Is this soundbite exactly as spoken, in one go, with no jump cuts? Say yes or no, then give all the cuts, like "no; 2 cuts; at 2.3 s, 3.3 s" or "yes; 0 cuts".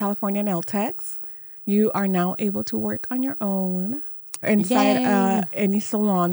yes; 0 cuts